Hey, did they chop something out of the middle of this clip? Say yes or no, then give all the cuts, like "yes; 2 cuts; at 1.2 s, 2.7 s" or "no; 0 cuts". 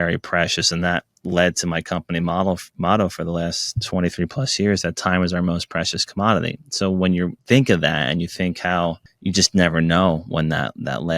yes; 2 cuts; at 7.4 s, 9.1 s